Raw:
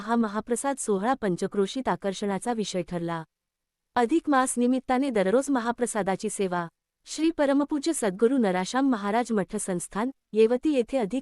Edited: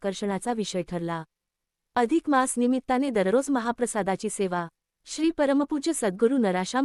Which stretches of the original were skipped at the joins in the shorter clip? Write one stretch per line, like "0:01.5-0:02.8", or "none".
none